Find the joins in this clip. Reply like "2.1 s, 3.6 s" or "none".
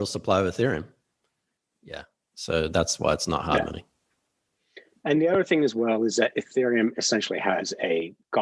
none